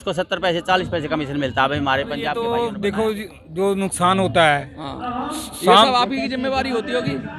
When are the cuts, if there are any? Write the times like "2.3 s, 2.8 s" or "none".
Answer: 2.3 s